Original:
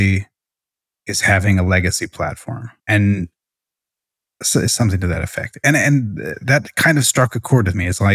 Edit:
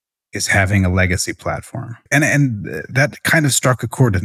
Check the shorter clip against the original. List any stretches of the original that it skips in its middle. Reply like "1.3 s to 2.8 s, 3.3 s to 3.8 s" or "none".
2.7 s to 5.4 s